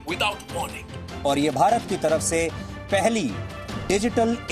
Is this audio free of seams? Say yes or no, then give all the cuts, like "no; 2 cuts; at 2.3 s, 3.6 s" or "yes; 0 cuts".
no; 1 cut; at 1.1 s